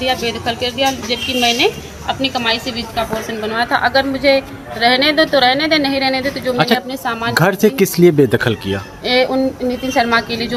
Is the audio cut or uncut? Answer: uncut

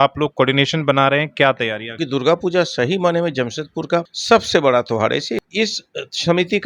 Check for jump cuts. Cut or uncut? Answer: cut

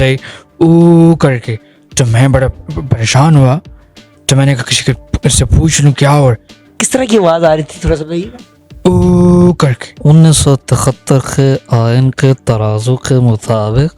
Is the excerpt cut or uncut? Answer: cut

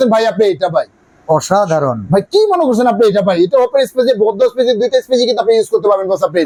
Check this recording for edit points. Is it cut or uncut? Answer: uncut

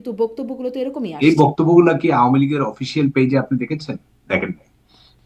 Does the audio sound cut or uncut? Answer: cut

